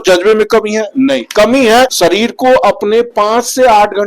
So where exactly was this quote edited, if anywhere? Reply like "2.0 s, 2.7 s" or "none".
1.9 s

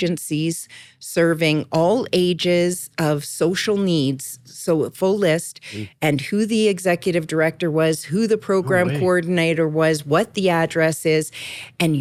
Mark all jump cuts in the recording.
none

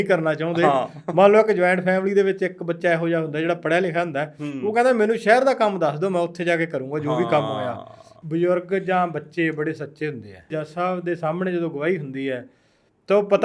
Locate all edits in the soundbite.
8.1 s, 10.6 s

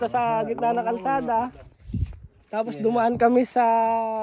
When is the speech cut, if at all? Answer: none

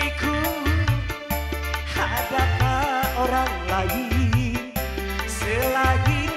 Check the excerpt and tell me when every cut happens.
none

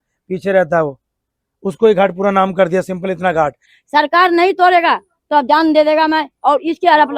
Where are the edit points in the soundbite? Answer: 3.7 s

